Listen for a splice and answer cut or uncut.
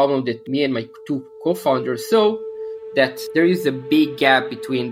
uncut